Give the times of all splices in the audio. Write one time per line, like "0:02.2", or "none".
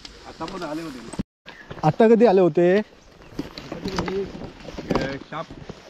0:01.4